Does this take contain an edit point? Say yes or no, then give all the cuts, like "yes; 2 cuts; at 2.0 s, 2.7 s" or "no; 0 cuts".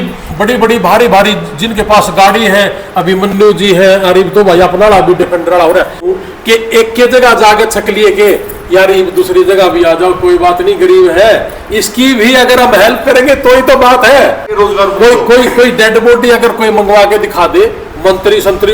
yes; 2 cuts; at 6.2 s, 14.5 s